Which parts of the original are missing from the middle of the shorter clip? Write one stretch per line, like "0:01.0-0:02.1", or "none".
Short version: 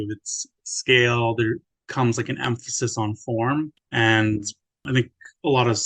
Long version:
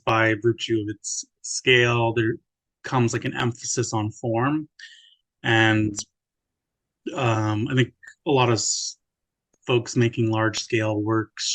0:02.5-0:02.7
0:04.8-0:05.3
0:06.4-0:07.7